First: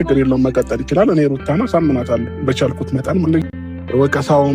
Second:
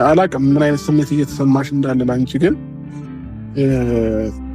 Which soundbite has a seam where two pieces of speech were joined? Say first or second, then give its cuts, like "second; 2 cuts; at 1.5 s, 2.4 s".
first; 1 cut; at 3.4 s